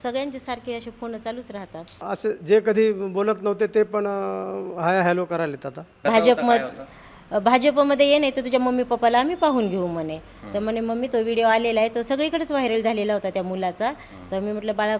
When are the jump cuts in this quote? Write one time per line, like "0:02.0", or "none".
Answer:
0:02.0
0:06.0